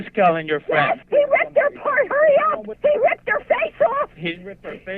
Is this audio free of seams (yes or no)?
no